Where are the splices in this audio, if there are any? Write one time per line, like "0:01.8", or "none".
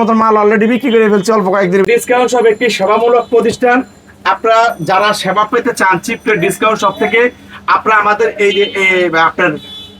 0:01.9